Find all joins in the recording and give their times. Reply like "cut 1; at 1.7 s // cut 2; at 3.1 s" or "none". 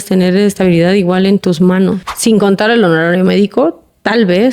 cut 1; at 2.1 s